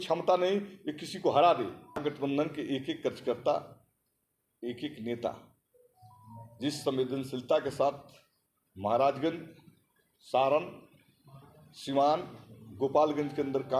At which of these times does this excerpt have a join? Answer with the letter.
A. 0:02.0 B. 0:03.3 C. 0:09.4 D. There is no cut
A